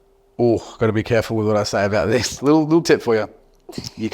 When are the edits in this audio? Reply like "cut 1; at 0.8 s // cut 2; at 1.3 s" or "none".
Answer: cut 1; at 2.4 s